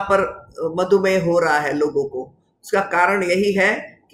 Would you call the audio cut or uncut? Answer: uncut